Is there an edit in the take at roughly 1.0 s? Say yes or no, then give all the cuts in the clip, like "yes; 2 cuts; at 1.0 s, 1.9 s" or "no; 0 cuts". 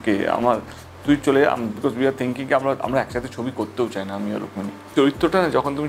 no; 1 cut; at 4.9 s